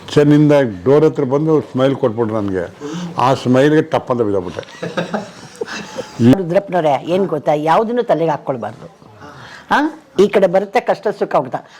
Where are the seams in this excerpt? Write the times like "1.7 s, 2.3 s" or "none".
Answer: 6.4 s